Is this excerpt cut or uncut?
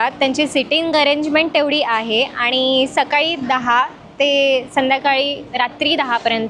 uncut